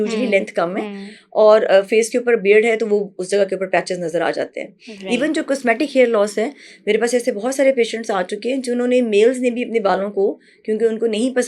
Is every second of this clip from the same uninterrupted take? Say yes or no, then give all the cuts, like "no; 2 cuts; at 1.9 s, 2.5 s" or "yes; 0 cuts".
yes; 0 cuts